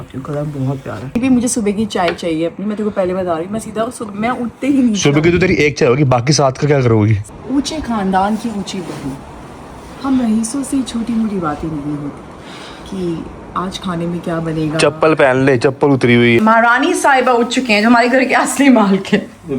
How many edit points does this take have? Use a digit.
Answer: 3